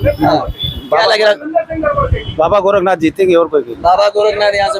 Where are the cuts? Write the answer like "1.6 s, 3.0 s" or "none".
none